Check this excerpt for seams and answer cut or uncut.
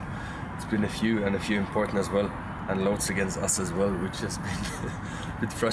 uncut